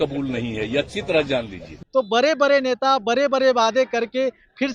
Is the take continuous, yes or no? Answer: no